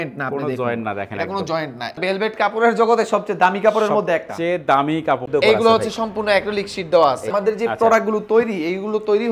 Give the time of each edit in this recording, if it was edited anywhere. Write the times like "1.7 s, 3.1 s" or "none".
2.0 s, 5.2 s, 7.3 s